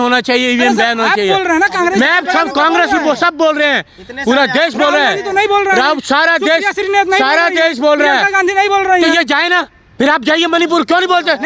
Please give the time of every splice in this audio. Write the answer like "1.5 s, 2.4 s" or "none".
none